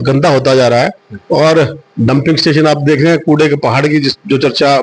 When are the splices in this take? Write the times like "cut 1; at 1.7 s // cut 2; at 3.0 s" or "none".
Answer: none